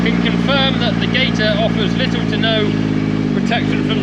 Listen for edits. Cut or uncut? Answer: uncut